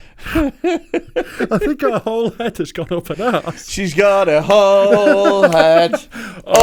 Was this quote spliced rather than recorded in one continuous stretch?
no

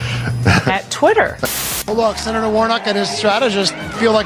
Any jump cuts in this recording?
yes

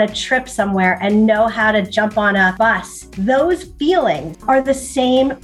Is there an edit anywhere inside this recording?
yes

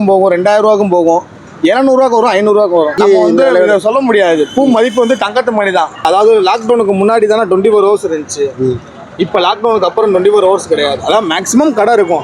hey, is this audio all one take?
no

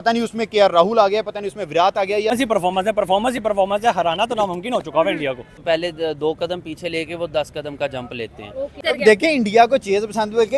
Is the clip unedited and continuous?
no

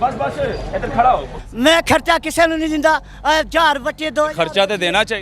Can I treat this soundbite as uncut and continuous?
no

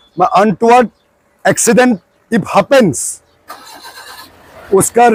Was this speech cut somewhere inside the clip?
no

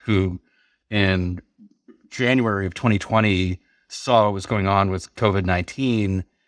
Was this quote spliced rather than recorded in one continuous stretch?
no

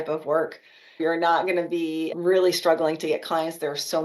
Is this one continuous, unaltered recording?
no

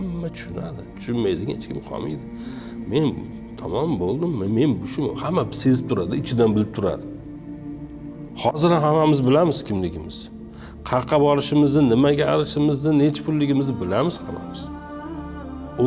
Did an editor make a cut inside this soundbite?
yes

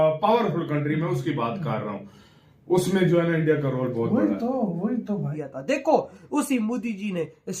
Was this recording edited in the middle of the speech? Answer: yes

